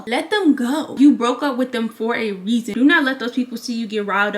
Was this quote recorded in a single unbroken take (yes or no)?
no